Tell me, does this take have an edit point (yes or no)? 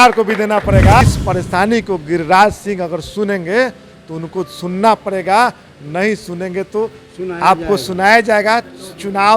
yes